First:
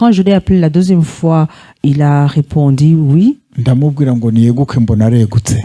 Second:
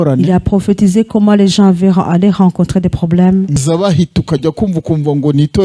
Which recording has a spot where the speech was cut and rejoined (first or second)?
second